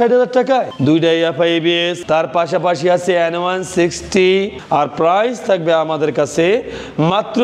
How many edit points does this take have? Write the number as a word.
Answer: two